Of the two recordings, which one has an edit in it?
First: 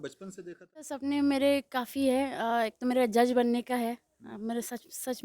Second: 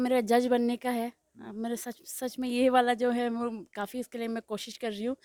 first; 1 cut; at 1.0 s

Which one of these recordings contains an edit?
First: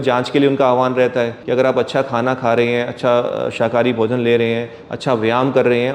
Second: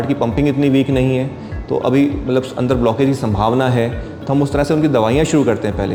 first; 1 cut; at 1.4 s

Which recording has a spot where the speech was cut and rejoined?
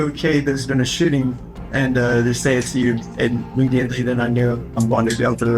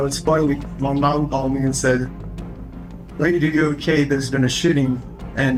first; 2 cuts; at 3.1 s, 4.8 s

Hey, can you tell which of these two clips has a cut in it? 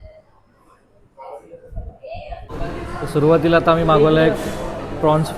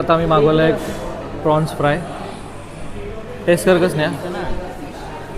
first; 1 cut; at 2.5 s

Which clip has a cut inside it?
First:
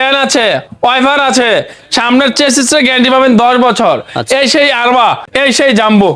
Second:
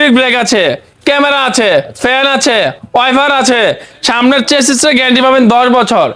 first; 1 cut; at 5.3 s

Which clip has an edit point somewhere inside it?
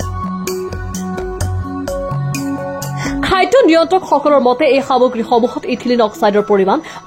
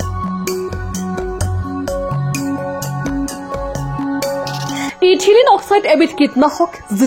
second; 1 cut; at 2.9 s

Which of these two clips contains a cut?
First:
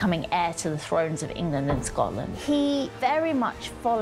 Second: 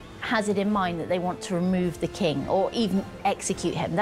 first; 2 cuts; at 2.3 s, 2.9 s

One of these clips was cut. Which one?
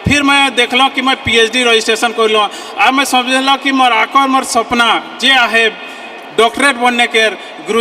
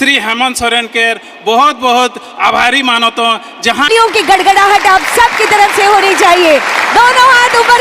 second; 1 cut; at 3.9 s

